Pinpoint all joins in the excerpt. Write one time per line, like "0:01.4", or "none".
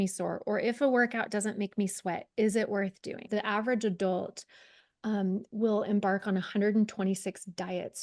0:03.2